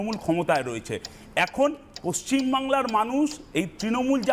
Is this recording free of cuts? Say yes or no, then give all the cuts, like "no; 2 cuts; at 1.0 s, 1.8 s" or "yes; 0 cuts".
yes; 0 cuts